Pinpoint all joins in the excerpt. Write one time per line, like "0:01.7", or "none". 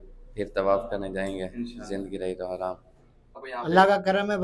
0:03.5